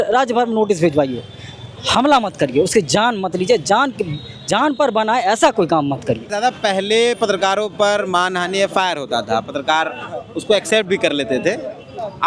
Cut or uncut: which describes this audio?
uncut